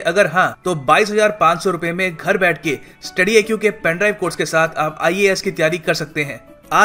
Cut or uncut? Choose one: uncut